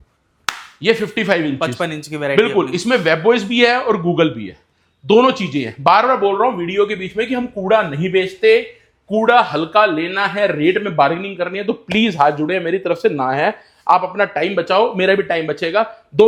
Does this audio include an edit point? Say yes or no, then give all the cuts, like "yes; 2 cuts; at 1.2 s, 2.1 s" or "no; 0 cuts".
no; 0 cuts